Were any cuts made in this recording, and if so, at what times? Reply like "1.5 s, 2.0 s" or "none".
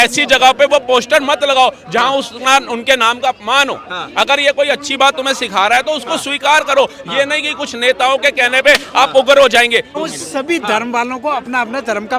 9.9 s